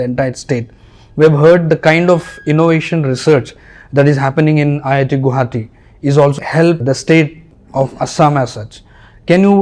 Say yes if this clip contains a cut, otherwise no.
yes